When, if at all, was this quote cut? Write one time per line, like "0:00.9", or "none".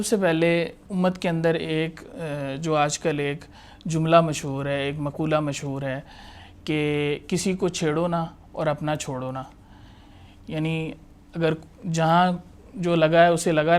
none